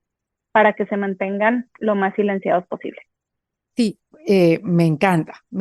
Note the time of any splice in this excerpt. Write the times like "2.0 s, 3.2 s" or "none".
none